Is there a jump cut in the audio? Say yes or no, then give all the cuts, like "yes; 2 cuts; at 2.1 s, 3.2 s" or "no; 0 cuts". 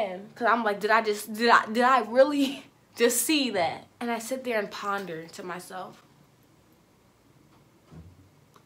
yes; 1 cut; at 3.9 s